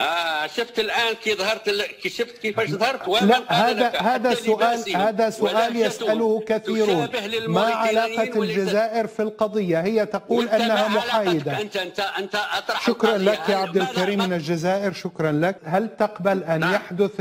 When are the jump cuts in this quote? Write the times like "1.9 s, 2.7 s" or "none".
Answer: 15.6 s

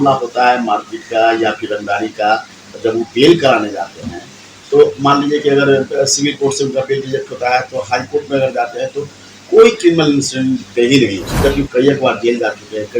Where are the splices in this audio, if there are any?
11.2 s

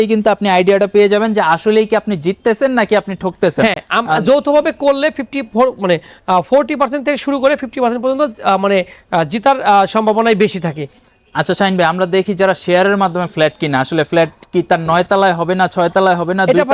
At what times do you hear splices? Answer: none

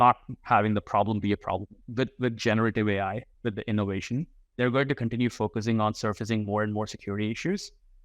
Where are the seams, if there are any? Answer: 1.8 s, 3.3 s, 4.4 s

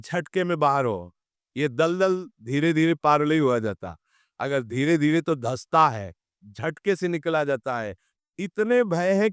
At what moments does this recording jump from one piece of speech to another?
none

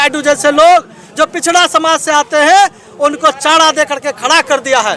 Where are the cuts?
none

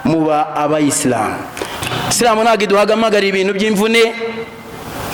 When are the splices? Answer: 1.8 s

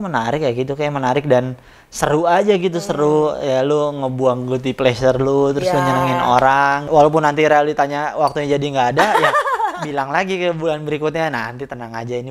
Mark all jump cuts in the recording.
none

